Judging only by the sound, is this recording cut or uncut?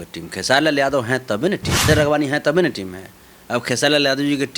cut